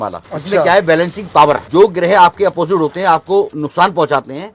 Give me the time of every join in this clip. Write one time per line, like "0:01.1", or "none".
none